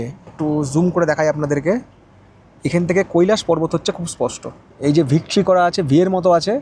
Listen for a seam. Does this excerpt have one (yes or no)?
no